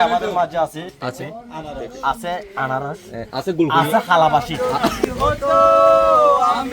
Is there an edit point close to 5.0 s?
yes; 1 cut; at 5.0 s

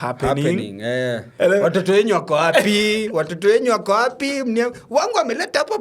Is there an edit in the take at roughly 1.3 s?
yes; 1 cut; at 1.3 s

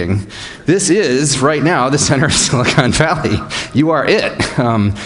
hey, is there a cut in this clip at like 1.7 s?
yes; 1 cut; at 1.7 s

